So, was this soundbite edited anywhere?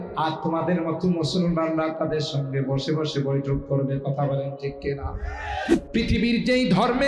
yes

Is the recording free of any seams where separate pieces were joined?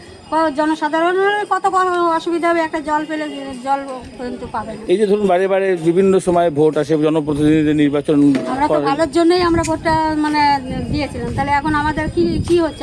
yes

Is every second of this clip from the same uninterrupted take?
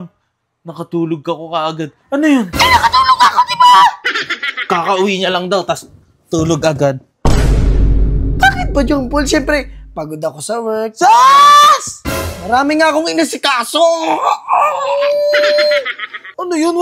yes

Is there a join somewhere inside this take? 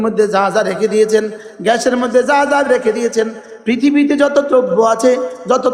no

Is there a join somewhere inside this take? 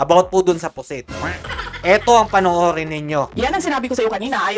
yes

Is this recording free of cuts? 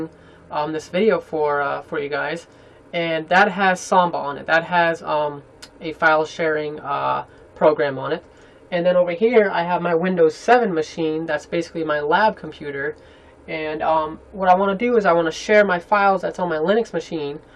no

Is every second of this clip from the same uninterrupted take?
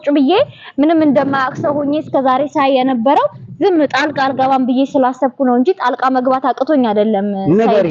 yes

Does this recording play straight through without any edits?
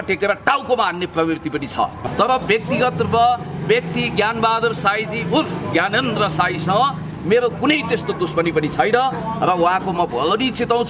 no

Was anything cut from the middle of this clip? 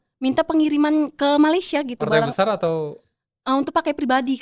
no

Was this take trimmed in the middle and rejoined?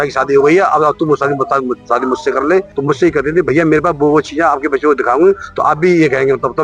yes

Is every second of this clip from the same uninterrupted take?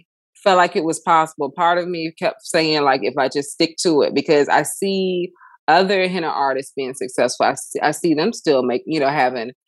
yes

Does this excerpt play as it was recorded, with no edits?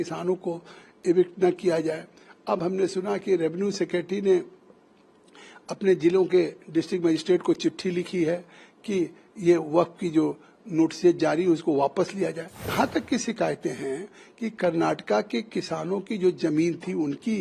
no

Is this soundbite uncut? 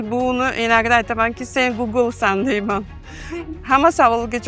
yes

